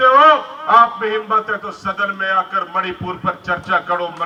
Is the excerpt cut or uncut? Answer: uncut